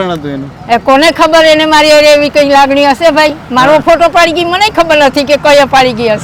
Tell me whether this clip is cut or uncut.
uncut